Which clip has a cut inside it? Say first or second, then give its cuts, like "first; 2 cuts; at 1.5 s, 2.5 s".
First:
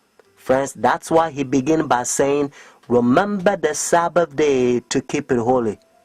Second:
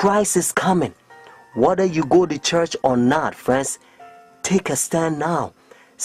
second; 1 cut; at 2.7 s